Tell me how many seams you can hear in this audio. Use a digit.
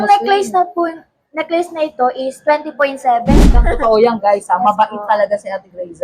1